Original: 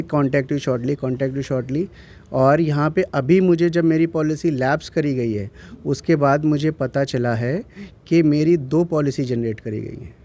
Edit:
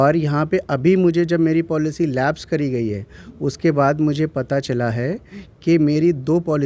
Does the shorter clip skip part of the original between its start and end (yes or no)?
no